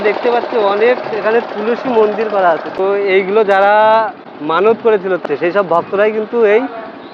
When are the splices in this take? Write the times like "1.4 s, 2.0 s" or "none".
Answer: none